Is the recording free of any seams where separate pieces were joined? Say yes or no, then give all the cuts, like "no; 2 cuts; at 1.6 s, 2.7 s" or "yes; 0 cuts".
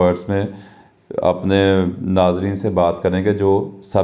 yes; 0 cuts